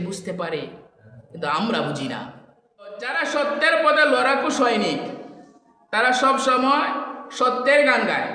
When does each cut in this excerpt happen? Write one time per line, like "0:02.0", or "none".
0:03.1